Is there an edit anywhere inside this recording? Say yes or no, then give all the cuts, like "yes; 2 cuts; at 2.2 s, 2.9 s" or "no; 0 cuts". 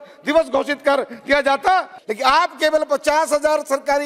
yes; 1 cut; at 1.9 s